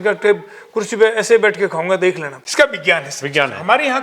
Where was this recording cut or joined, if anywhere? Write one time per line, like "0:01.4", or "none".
0:02.3